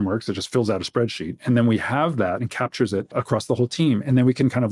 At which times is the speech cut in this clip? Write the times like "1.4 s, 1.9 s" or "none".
3.1 s